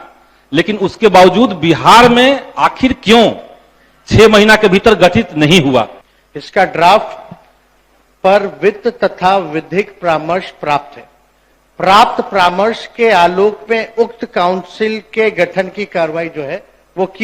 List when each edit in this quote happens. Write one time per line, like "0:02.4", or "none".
0:06.0

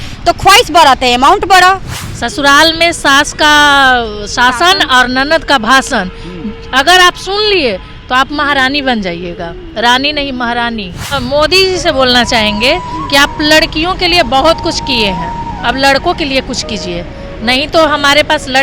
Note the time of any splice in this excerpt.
0:01.9
0:11.2

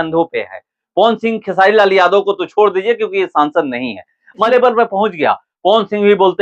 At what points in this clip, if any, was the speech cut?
0:04.5

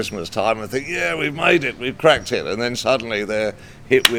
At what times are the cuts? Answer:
none

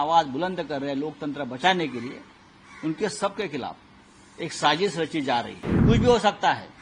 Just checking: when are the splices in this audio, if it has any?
0:05.6

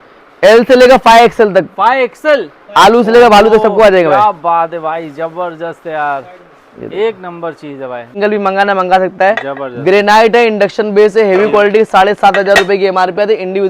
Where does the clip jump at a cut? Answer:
0:08.1

